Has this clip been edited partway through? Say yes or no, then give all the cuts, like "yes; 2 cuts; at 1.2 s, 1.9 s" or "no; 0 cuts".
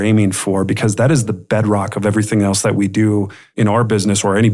yes; 1 cut; at 3.4 s